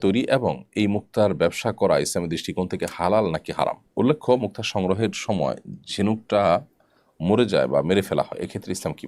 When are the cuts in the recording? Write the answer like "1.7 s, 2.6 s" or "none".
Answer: none

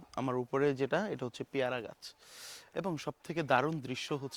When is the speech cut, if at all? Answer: none

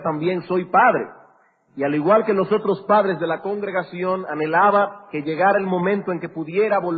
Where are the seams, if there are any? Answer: none

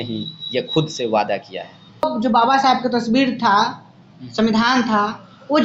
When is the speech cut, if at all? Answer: 2.0 s

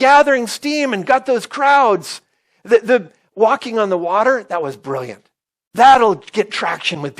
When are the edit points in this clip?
5.6 s

